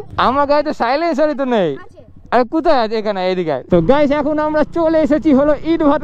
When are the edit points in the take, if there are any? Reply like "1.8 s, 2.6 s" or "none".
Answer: 3.6 s